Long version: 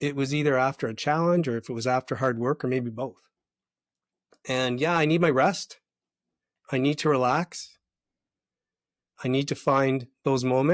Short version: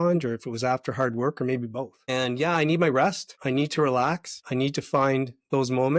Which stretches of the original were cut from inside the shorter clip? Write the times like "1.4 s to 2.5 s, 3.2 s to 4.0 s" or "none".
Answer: 3.2 s to 4.4 s, 5.7 s to 6.6 s, 7.6 s to 9.1 s